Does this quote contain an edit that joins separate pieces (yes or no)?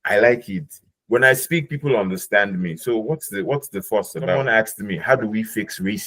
yes